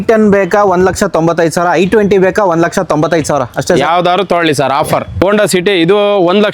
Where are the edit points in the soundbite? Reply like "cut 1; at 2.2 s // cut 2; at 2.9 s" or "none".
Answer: cut 1; at 5.2 s